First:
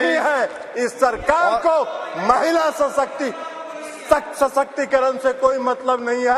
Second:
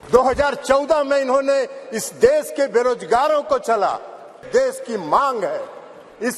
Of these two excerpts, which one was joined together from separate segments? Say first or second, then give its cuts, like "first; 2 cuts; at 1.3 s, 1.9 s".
second; 1 cut; at 4.4 s